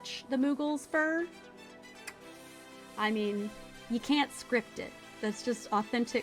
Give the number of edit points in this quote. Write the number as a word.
zero